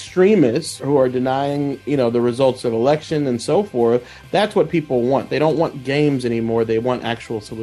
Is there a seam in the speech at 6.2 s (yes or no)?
no